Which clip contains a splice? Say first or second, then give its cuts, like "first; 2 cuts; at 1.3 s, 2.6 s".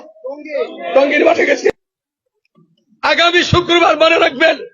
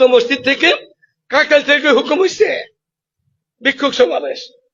first; 1 cut; at 1.7 s